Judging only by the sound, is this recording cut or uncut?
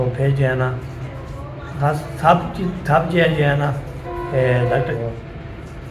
cut